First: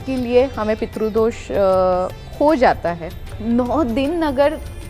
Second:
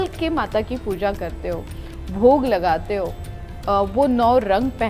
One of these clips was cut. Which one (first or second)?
first